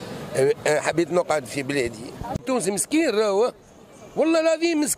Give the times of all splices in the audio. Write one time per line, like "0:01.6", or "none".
0:02.4